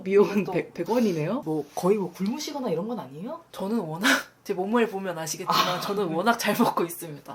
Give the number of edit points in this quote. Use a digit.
1